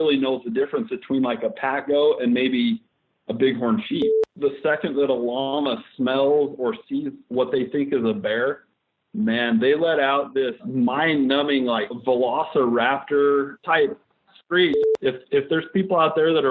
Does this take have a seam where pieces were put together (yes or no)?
yes